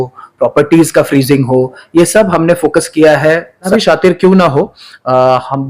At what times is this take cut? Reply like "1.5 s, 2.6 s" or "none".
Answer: 3.7 s